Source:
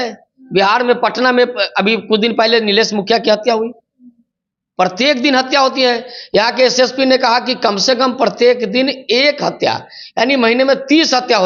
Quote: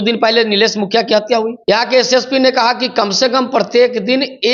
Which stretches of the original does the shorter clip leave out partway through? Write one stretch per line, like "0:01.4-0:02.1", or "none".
0:03.7-0:06.2